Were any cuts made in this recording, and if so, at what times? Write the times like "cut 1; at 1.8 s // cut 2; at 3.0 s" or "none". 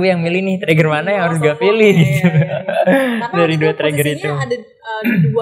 none